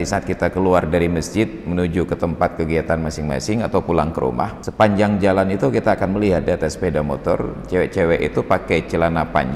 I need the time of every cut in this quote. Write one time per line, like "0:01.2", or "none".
0:04.6